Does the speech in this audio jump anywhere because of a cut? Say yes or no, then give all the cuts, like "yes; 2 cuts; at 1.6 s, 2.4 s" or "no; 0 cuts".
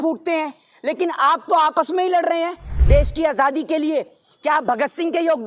yes; 1 cut; at 2.8 s